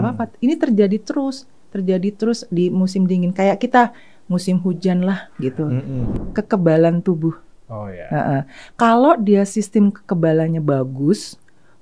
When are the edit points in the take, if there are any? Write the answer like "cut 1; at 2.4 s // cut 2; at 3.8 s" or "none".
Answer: cut 1; at 6.1 s

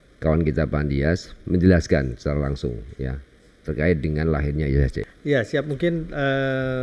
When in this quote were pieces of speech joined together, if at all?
cut 1; at 5.0 s

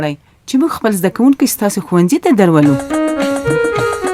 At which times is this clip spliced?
cut 1; at 2.8 s

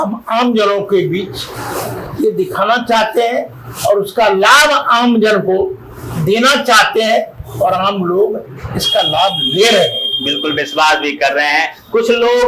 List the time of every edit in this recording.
none

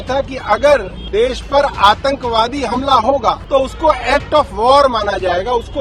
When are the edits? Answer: cut 1; at 1.0 s // cut 2; at 3.4 s

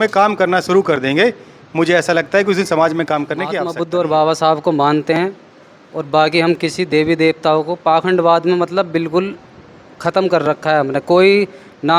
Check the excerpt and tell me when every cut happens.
cut 1; at 3.6 s

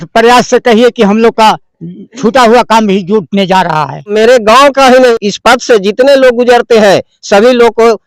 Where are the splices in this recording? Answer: cut 1; at 4.1 s // cut 2; at 5.1 s

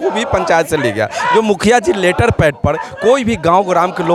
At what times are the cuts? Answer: none

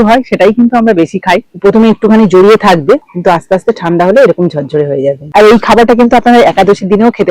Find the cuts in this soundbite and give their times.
cut 1; at 1.4 s // cut 2; at 5.2 s

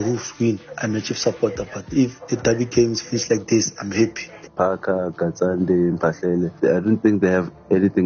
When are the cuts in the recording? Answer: cut 1; at 4.5 s // cut 2; at 6.5 s

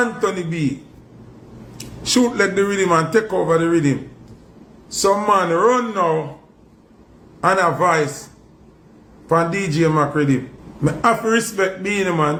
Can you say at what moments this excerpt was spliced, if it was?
none

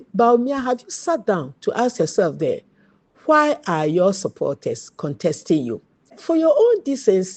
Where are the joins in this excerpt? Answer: cut 1; at 6.2 s

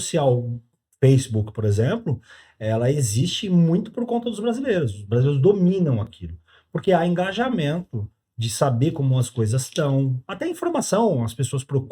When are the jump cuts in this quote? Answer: none

